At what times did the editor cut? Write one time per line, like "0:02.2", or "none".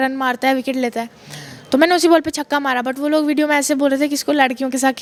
none